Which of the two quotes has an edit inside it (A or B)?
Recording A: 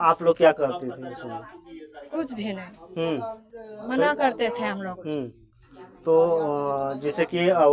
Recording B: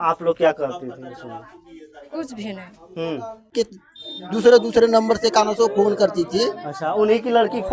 B